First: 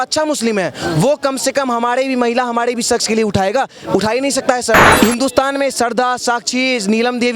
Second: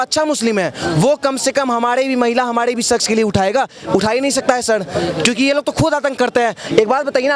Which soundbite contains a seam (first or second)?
first